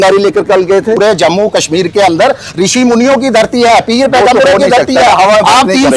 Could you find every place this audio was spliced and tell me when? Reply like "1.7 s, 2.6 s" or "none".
1.0 s